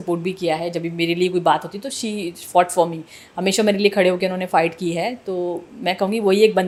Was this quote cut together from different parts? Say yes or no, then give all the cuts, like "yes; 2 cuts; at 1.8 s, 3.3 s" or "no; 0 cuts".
no; 0 cuts